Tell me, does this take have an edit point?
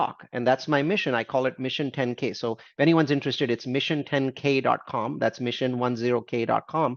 no; 0 cuts

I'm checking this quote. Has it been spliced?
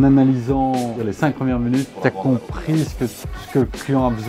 yes; 2 cuts; at 1.1 s, 1.9 s

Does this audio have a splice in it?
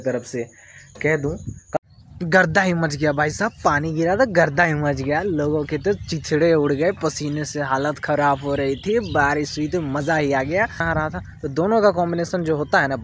yes; 2 cuts; at 1.7 s, 10.8 s

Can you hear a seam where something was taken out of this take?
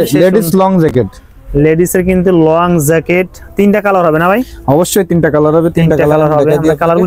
no; 0 cuts

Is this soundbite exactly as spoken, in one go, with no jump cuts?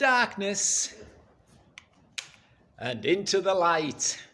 yes; 0 cuts

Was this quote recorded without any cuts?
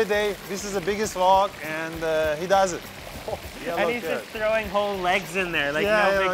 yes; 0 cuts

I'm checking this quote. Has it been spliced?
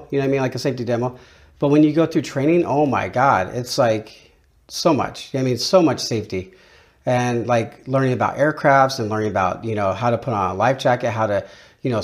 no; 0 cuts

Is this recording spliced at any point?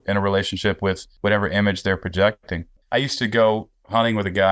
yes; 2 cuts; at 1.1 s, 2.7 s

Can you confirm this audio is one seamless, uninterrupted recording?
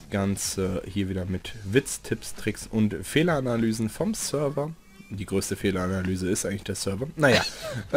no; 1 cut; at 5.1 s

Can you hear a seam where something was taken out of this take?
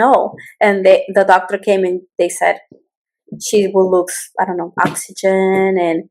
no; 0 cuts

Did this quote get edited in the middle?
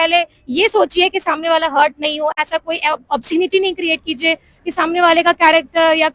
no; 0 cuts

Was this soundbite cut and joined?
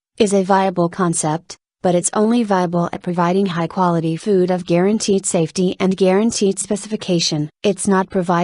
yes; 1 cut; at 7.3 s

